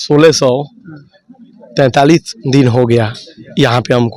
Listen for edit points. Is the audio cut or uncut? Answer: uncut